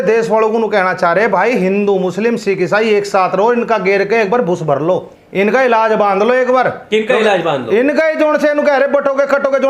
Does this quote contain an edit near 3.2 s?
no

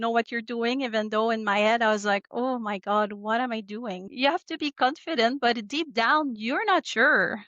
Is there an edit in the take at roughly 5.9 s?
no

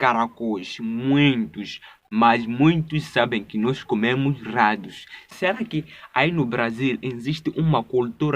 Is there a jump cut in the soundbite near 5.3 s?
yes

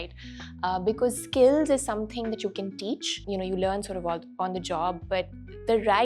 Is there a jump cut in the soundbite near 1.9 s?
no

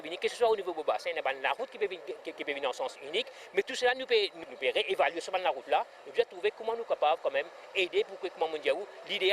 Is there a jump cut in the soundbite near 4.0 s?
no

